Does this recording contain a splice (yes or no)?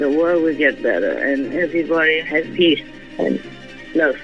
no